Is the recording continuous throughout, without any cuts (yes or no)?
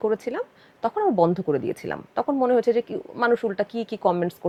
yes